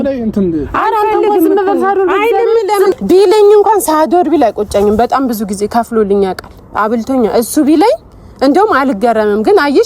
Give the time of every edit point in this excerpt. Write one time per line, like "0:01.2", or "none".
0:02.9